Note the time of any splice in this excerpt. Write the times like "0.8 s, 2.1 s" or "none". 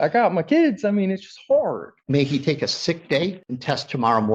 1.9 s, 3.5 s